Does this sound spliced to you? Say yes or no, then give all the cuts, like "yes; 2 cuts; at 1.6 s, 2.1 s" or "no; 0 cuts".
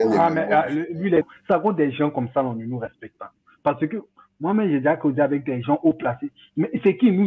yes; 1 cut; at 1.3 s